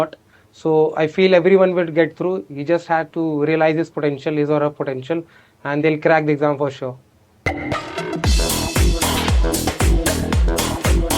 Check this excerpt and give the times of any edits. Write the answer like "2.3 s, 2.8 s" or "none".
7.3 s